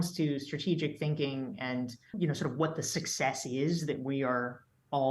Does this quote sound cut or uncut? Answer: cut